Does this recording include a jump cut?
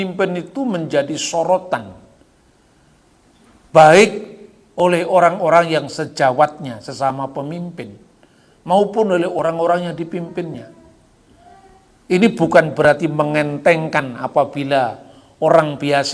no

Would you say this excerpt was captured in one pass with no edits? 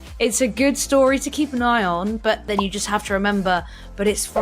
no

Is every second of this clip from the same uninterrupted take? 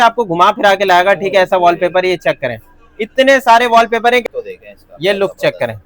no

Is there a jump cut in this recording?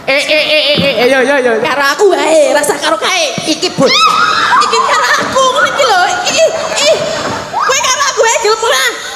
no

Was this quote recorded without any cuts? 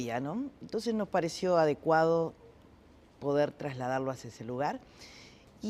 no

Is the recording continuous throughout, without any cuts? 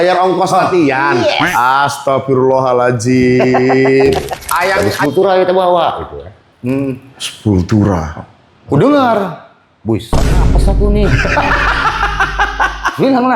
no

